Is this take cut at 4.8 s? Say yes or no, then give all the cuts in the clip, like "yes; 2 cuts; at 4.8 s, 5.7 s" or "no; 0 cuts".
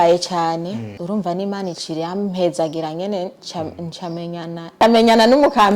yes; 2 cuts; at 0.9 s, 4.8 s